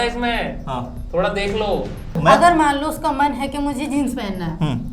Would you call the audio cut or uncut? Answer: cut